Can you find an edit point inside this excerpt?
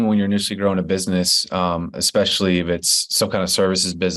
no; 0 cuts

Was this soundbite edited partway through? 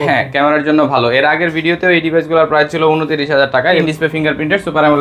yes; 1 cut; at 3.8 s

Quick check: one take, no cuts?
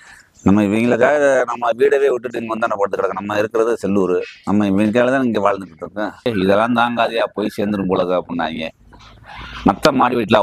no; 1 cut; at 6.3 s

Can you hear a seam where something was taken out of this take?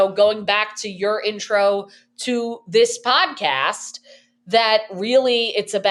no; 0 cuts

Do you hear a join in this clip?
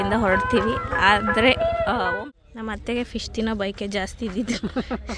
yes; 1 cut; at 2.1 s

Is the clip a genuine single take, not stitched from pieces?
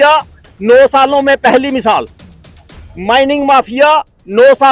yes; 0 cuts

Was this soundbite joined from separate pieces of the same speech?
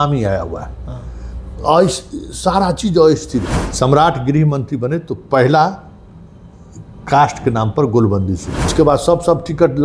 yes; 2 cuts; at 3.6 s, 8.7 s

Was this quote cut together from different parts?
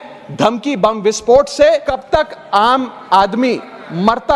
yes; 1 cut; at 1.9 s

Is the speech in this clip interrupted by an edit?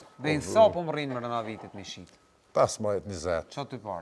no; 0 cuts

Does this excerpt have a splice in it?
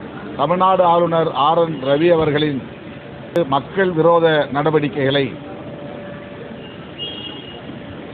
no; 0 cuts

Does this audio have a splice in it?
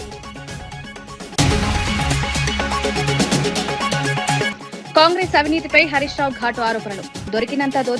no; 0 cuts

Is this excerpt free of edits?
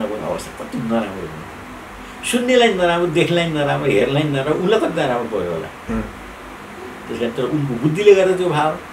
yes; 0 cuts

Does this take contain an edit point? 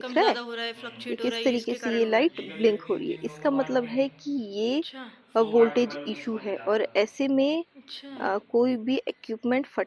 no; 0 cuts

